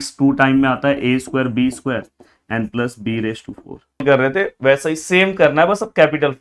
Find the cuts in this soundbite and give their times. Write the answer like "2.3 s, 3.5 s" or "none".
4.0 s